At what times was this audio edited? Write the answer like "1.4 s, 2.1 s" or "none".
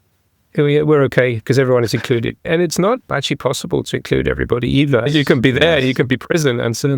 5.0 s

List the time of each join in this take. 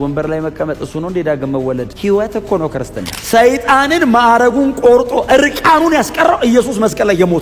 1.9 s, 3.2 s

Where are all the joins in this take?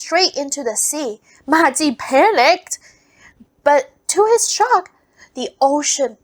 none

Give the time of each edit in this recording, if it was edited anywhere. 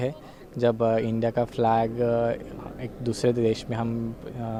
none

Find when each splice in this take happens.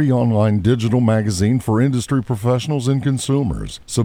none

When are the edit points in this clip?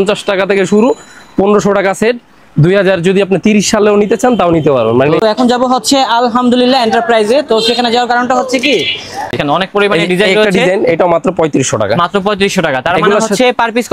5.2 s, 9.3 s

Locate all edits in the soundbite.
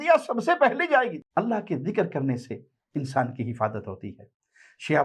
1.1 s

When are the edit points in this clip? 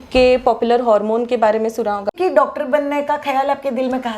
2.1 s

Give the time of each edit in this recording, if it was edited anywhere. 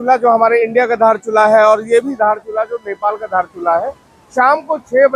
none

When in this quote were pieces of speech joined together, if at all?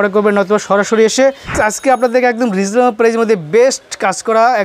1.6 s

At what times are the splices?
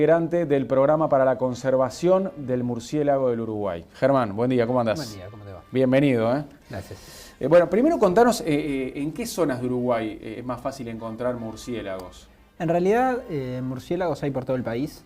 11.4 s

